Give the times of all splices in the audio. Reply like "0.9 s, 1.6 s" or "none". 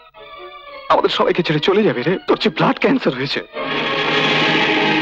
2.2 s